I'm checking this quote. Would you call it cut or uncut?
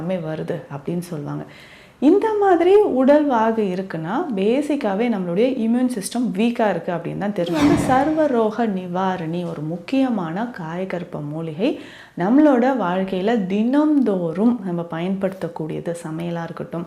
cut